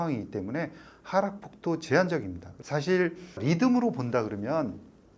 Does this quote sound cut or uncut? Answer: cut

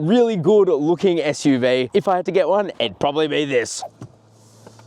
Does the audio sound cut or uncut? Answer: cut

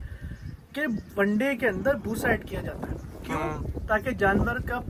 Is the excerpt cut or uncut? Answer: uncut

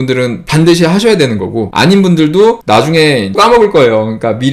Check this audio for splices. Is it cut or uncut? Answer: uncut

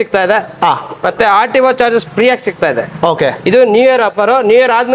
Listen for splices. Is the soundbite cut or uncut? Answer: uncut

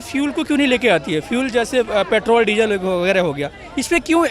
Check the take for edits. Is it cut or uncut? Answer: uncut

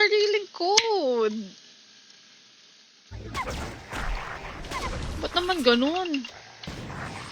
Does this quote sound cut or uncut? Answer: cut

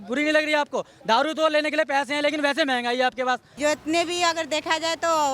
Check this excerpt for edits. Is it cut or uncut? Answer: cut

